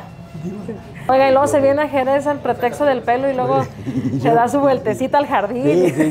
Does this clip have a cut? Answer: yes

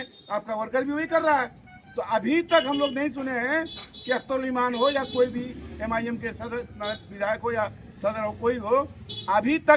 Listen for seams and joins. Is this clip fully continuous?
yes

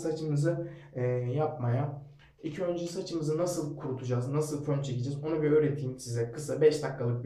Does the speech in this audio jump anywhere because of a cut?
no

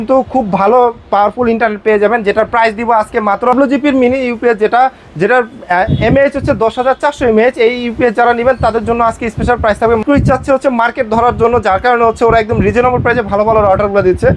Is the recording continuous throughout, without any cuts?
no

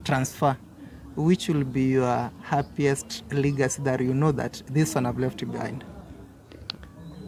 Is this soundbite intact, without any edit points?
yes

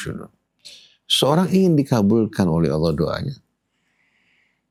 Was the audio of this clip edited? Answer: no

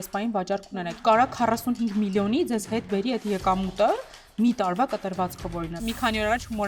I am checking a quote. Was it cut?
yes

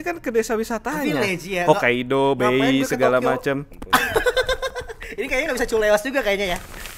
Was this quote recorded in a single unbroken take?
no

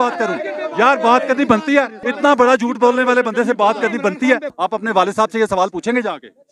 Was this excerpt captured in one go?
no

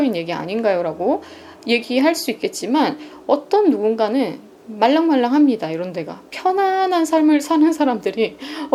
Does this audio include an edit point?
no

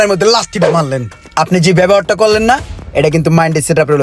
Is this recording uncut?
yes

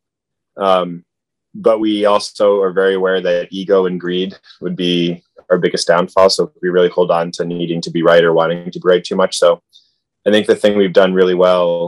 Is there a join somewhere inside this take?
no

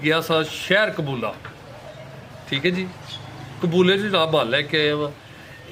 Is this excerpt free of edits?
yes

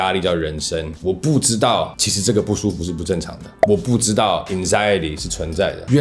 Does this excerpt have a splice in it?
no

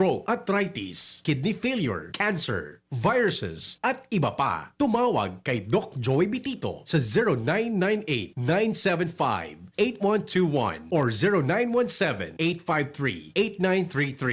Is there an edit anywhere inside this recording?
no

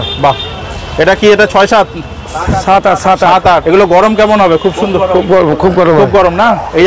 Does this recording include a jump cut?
yes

